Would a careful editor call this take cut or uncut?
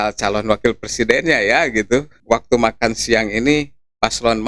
cut